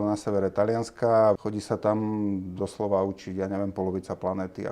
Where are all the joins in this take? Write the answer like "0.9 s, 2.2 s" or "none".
1.4 s